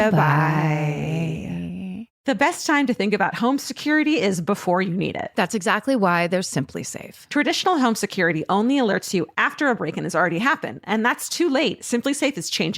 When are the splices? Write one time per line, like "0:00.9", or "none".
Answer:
0:02.1